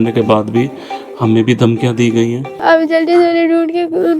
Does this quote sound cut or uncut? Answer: cut